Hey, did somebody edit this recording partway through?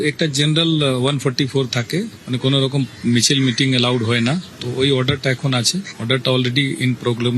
no; 0 cuts

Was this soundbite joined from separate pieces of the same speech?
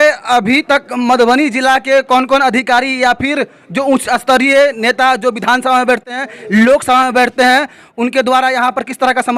no; 0 cuts

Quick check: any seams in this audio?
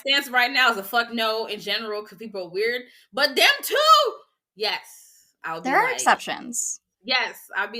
no; 0 cuts

